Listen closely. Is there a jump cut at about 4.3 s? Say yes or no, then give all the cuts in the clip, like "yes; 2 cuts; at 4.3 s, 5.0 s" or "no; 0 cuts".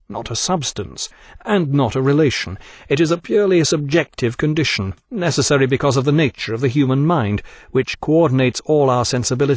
yes; 1 cut; at 4.3 s